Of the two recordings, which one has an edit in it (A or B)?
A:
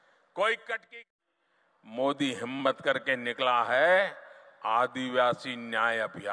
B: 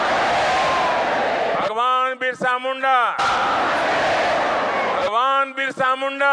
A